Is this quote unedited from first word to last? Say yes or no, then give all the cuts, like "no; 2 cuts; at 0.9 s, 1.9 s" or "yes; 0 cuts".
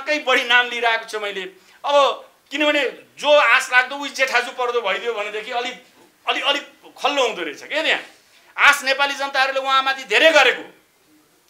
yes; 0 cuts